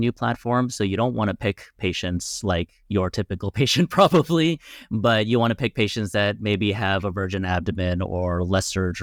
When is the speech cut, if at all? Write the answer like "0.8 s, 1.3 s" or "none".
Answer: none